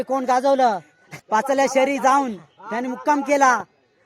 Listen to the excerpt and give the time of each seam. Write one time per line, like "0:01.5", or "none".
0:01.1